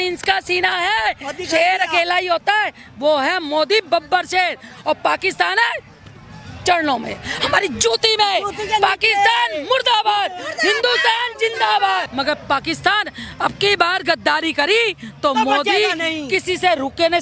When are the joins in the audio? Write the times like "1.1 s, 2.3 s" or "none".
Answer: 12.1 s